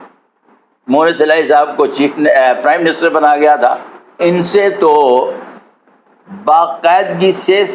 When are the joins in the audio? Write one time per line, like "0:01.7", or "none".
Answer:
0:04.2